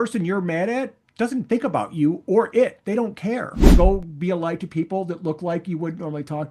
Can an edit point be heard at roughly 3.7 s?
yes; 1 cut; at 3.7 s

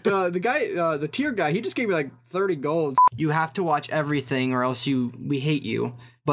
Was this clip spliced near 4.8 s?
no; 1 cut; at 3.0 s

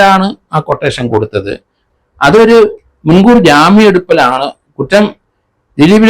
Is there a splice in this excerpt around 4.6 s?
no; 1 cut; at 1.9 s

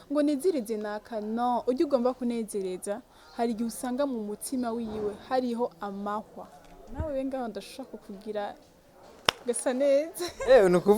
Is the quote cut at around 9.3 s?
no; 1 cut; at 6.9 s

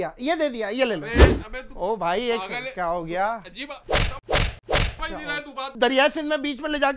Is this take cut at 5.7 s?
yes; 1 cut; at 5.7 s

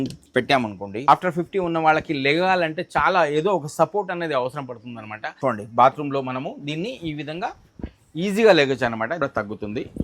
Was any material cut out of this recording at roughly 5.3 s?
yes; 3 cuts; at 1.1 s, 5.3 s, 9.2 s

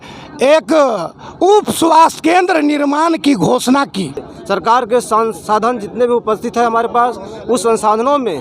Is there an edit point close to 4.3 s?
yes; 1 cut; at 4.3 s

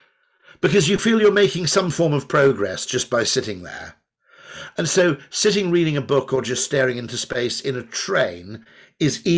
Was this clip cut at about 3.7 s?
no; 0 cuts

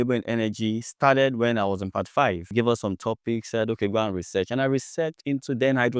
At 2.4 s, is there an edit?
yes; 1 cut; at 2.4 s

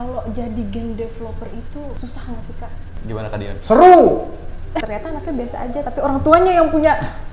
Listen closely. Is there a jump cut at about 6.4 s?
no; 3 cuts; at 2.0 s, 2.9 s, 4.8 s

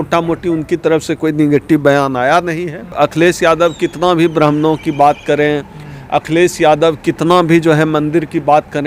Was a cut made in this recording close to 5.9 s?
no; 1 cut; at 2.9 s

